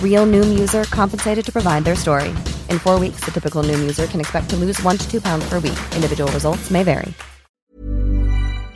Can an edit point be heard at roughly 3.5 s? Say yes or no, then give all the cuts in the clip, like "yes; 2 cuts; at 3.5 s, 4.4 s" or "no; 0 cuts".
no; 1 cut; at 7.7 s